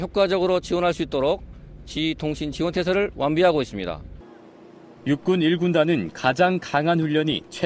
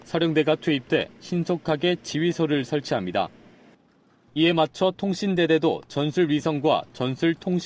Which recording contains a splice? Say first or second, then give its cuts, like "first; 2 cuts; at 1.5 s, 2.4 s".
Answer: first; 1 cut; at 1.0 s